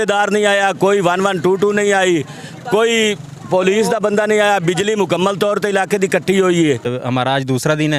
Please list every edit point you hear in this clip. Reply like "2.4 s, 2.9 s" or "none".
6.9 s